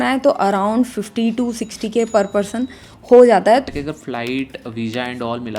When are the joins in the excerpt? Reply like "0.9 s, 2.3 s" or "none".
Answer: 3.6 s

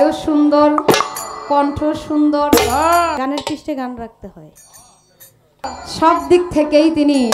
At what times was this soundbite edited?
3.2 s, 5.6 s

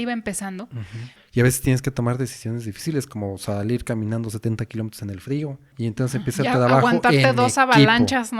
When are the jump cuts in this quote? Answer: 1.2 s, 5.7 s

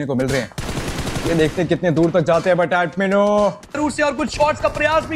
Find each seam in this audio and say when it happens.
3.8 s

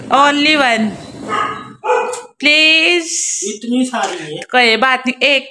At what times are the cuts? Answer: none

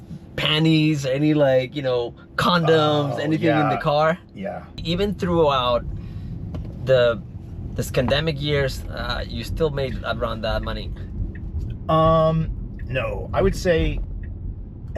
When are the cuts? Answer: 4.8 s

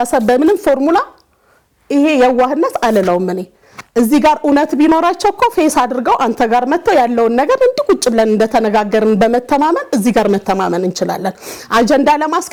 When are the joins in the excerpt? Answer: none

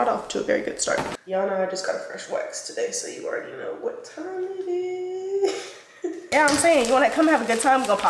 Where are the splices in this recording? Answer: 1.2 s, 5.9 s

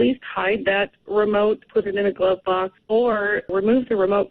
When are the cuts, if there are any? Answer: 1.6 s, 2.8 s, 3.5 s

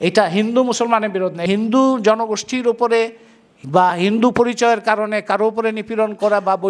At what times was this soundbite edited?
1.4 s

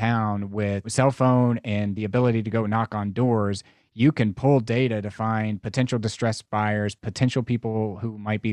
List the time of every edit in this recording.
0.9 s

